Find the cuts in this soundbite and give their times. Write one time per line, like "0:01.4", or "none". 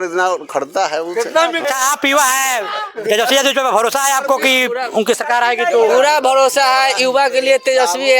0:01.7